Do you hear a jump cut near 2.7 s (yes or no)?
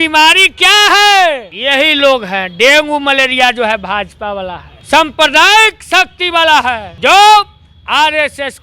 no